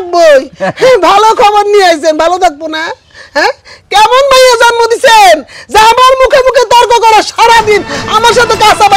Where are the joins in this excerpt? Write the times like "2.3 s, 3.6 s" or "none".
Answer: none